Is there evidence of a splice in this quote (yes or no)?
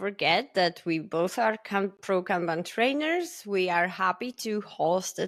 no